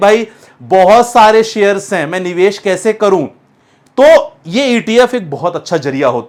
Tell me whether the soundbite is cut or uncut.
uncut